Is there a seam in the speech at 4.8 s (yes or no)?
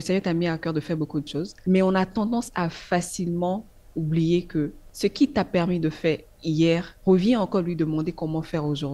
yes